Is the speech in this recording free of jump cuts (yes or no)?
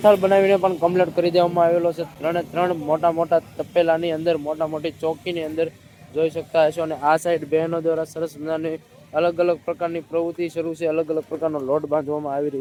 yes